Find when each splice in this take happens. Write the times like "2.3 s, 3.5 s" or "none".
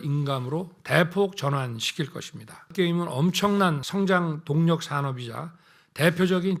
2.7 s, 3.8 s